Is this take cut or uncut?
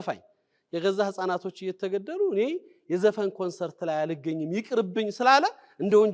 uncut